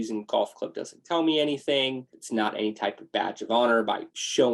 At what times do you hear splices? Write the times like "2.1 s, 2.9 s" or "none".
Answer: 2.1 s

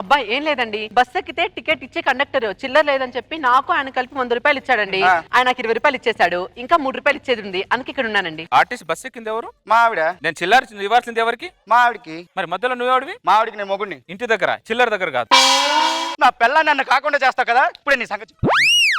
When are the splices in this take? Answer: 8.4 s, 16.2 s

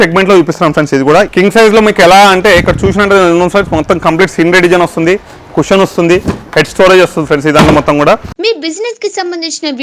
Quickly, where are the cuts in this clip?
1.3 s, 8.3 s

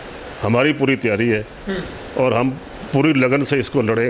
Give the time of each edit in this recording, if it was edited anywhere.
none

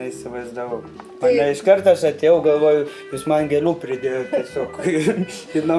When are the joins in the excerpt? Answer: none

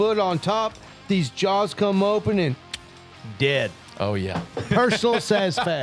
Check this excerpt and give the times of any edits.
none

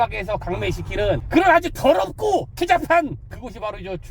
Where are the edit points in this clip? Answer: 1.2 s, 2.5 s, 3.3 s

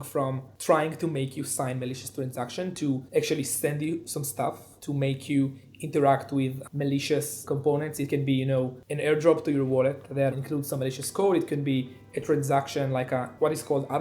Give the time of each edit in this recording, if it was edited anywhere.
3.0 s, 4.7 s, 7.4 s, 10.3 s

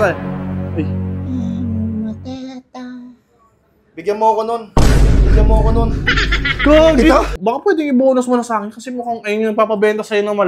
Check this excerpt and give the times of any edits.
7.3 s

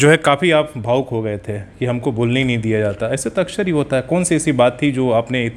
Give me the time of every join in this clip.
none

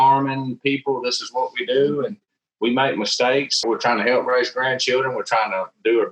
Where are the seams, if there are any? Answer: 3.6 s

